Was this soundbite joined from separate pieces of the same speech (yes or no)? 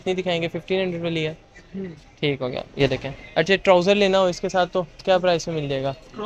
no